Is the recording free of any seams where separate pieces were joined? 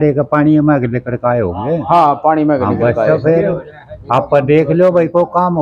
yes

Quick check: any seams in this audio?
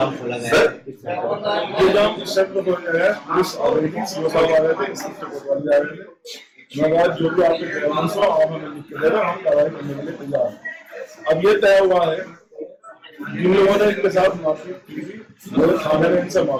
no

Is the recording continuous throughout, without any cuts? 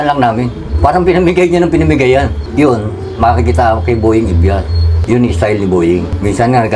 yes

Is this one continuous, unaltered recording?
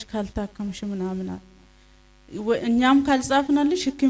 yes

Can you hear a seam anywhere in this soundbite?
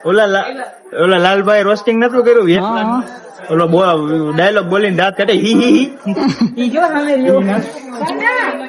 no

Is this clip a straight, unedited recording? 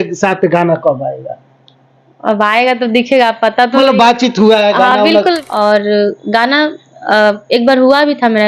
no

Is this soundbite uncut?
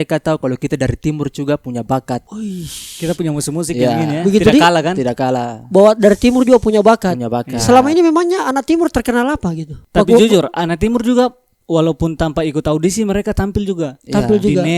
yes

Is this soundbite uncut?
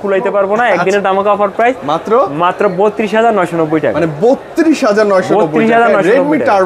yes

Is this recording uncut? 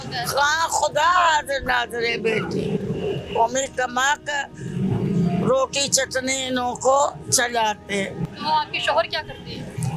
yes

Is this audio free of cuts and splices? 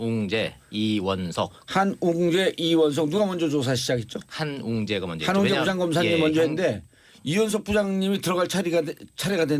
yes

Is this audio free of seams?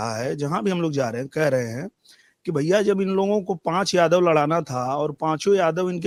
yes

